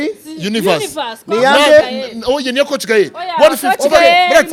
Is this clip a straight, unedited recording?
yes; 0 cuts

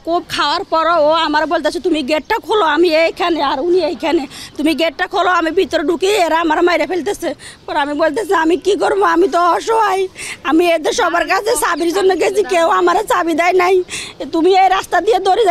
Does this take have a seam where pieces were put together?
no; 0 cuts

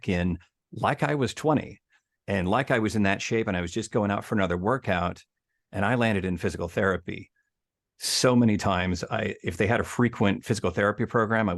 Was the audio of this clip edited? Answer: no; 0 cuts

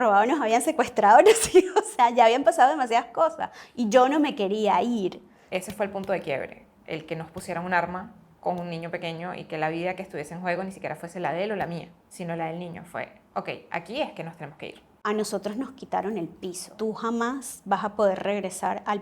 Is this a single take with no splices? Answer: no; 4 cuts; at 5.3 s, 12.0 s, 14.9 s, 16.7 s

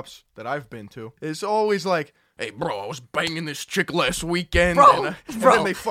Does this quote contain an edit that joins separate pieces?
yes; 1 cut; at 1.0 s

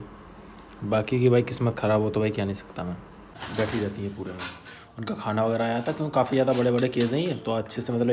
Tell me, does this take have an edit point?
yes; 1 cut; at 3.4 s

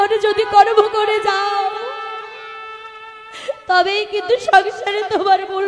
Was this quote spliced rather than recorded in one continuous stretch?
no; 0 cuts

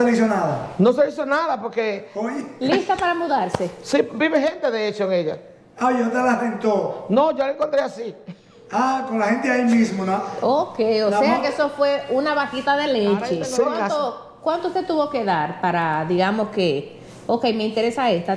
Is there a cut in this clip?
yes; 1 cut; at 13.5 s

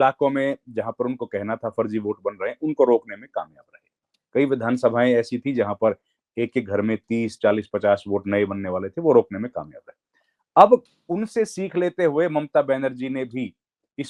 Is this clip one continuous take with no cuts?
yes; 0 cuts

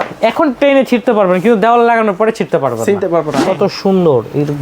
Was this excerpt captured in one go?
no; 1 cut; at 3.4 s

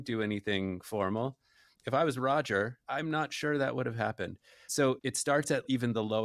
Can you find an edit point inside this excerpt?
yes; 3 cuts; at 1.8 s, 2.8 s, 4.8 s

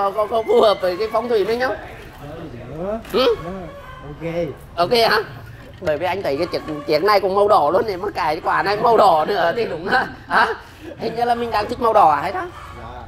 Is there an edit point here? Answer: no; 0 cuts

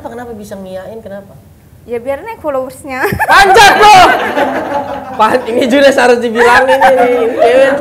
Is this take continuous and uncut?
yes; 0 cuts

